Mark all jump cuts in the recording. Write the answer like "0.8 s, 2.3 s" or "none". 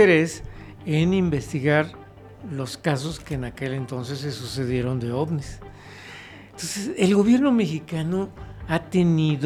none